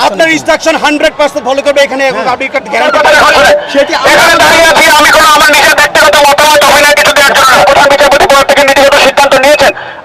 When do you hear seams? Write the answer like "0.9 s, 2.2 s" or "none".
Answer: 2.9 s, 7.6 s